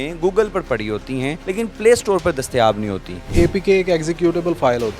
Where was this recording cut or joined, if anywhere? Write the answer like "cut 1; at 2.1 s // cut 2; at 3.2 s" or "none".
cut 1; at 1.4 s // cut 2; at 3.3 s